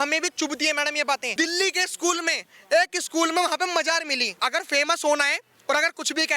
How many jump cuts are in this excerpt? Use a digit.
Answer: 2